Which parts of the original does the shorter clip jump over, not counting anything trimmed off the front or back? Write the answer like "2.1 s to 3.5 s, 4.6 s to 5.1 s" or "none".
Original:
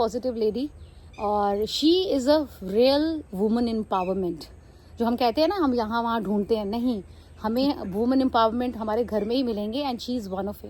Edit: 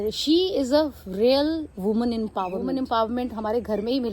4.1 s to 8.0 s